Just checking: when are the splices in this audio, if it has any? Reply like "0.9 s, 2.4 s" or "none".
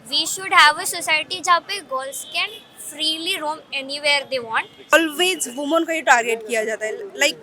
4.9 s